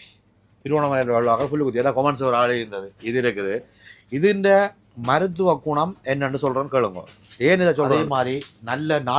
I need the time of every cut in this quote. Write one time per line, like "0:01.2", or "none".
0:07.9